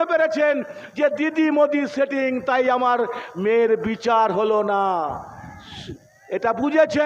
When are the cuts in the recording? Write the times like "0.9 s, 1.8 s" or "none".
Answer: none

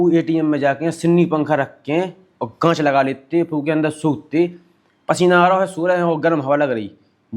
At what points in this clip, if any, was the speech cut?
none

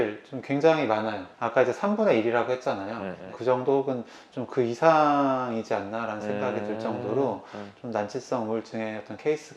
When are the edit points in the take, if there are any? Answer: none

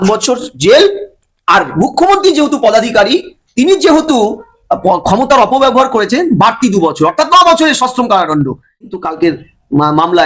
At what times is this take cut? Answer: 8.9 s

